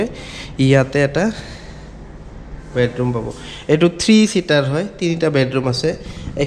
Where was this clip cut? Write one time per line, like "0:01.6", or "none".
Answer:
none